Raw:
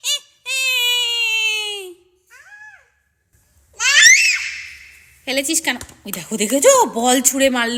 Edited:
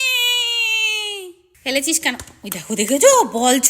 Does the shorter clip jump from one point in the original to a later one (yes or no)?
yes